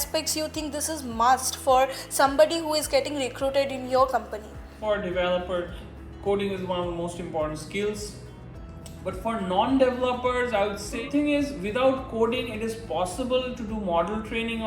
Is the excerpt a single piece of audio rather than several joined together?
no; 2 cuts; at 4.7 s, 11.0 s

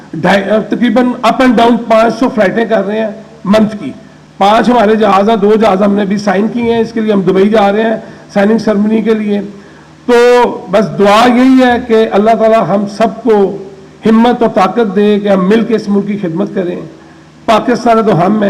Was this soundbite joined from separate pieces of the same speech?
no; 0 cuts

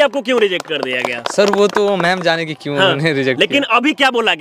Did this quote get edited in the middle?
no; 0 cuts

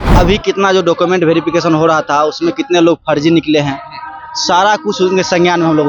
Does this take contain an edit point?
no; 0 cuts

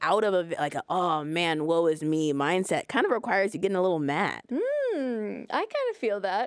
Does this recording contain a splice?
yes; 1 cut; at 4.4 s

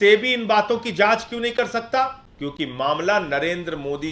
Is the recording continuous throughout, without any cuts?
no; 1 cut; at 2.2 s

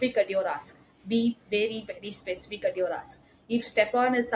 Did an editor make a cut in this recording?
no; 0 cuts

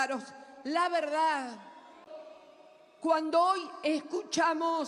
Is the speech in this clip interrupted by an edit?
yes; 1 cut; at 2.1 s

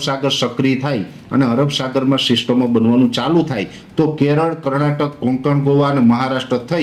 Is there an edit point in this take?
no; 0 cuts

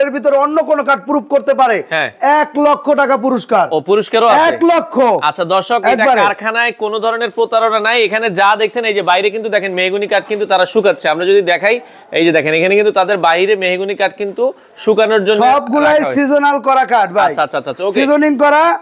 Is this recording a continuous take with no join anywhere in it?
yes; 0 cuts

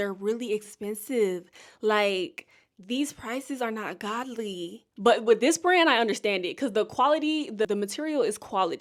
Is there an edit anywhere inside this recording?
no; 0 cuts

